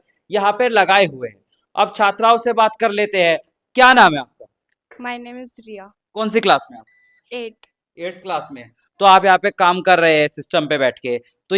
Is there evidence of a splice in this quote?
no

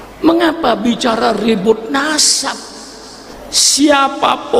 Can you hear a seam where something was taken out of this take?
yes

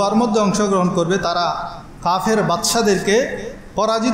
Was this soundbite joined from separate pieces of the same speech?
yes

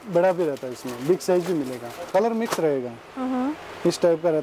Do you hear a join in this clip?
yes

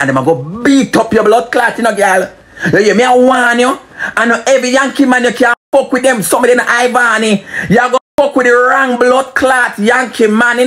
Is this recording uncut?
yes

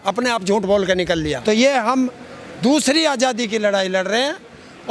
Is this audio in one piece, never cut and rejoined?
no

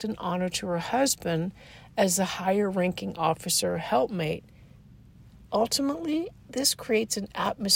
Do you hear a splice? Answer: no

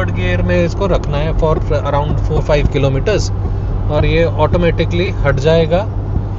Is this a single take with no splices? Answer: yes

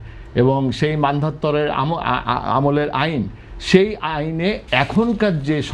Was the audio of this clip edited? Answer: no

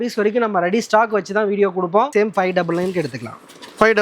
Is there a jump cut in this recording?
yes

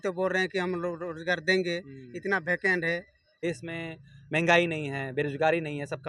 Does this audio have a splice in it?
yes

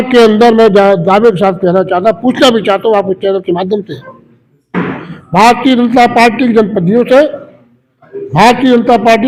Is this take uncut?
yes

